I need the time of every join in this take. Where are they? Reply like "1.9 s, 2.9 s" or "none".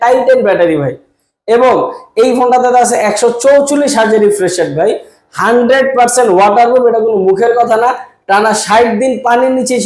none